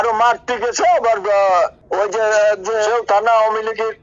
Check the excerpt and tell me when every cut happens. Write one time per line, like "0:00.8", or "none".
0:02.9